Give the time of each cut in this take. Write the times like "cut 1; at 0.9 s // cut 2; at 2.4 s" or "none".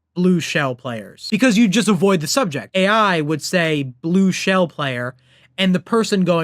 cut 1; at 1.1 s // cut 2; at 2.7 s